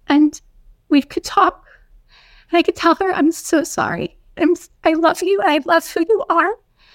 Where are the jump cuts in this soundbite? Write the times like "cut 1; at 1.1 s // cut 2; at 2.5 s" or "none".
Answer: none